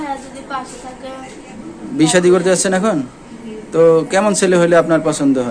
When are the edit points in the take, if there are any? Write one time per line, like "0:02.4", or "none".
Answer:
0:01.5